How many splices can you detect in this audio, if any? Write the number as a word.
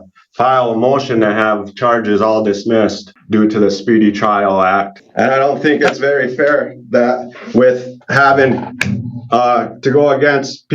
two